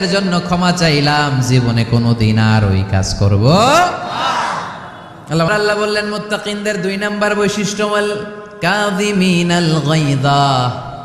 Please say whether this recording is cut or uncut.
cut